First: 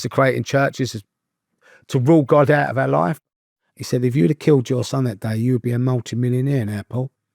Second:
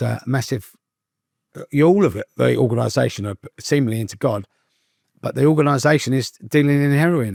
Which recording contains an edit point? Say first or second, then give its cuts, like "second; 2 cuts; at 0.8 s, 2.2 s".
first; 1 cut; at 3.2 s